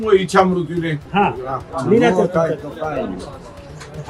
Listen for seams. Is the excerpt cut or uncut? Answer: cut